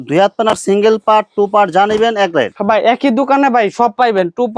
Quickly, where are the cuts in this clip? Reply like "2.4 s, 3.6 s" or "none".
none